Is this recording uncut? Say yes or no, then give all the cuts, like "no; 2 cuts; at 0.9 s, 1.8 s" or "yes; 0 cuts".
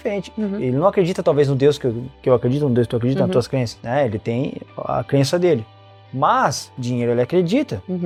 yes; 0 cuts